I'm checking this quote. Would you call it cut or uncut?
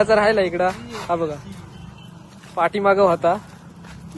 uncut